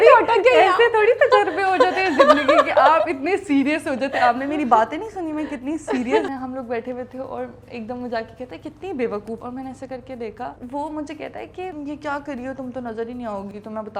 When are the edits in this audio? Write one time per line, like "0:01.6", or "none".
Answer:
0:06.3
0:09.4
0:10.6
0:11.8